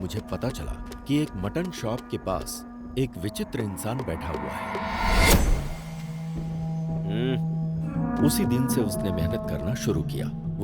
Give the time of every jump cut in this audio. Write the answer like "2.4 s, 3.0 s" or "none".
7.9 s